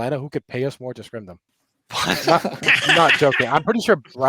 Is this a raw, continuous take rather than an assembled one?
yes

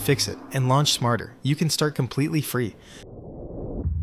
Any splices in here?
no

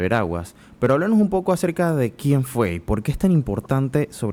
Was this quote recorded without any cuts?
yes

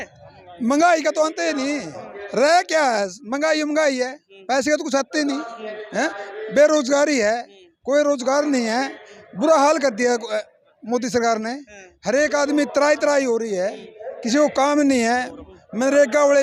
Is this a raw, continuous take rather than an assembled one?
yes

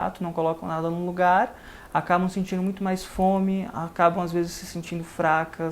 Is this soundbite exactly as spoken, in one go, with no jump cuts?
yes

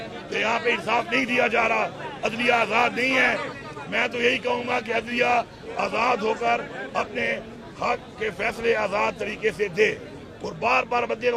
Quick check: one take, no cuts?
yes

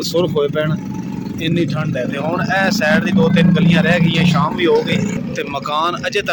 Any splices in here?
no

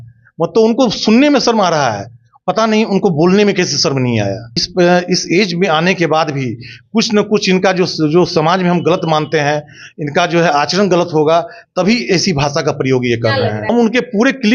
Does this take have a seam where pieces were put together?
yes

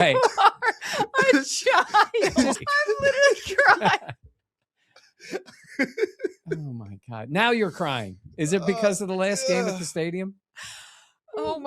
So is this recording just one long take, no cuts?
no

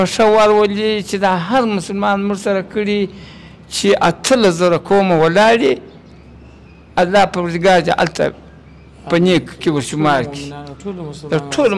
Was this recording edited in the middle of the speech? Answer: no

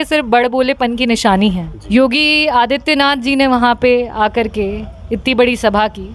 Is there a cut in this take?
yes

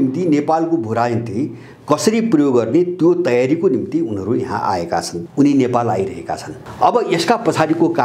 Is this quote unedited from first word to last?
no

